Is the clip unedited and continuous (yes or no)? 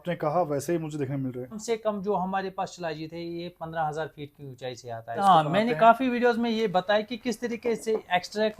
no